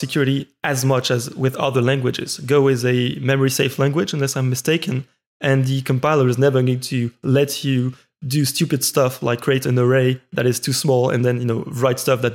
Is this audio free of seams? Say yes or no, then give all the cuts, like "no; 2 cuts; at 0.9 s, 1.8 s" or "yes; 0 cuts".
yes; 0 cuts